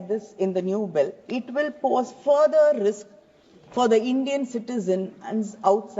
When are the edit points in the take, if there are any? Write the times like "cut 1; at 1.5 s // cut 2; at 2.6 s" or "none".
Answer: none